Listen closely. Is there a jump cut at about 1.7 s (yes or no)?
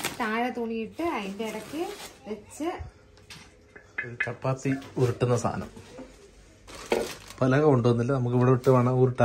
no